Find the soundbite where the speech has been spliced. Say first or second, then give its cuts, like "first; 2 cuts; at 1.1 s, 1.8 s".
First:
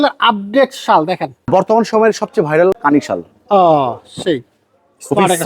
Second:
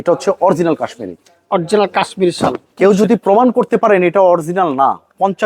first; 2 cuts; at 1.5 s, 2.8 s